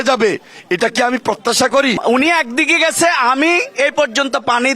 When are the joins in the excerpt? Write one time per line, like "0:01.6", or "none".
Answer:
0:02.0